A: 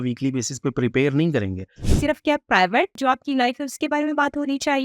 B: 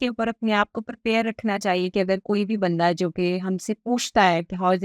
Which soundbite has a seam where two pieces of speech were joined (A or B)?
A